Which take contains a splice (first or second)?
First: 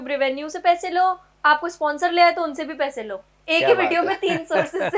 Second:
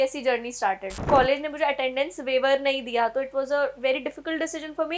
second